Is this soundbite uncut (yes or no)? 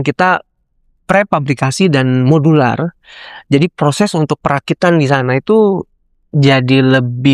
yes